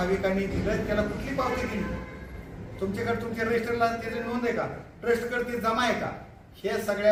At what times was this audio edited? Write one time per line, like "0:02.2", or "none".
none